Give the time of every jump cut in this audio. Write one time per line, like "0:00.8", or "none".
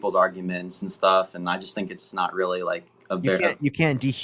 none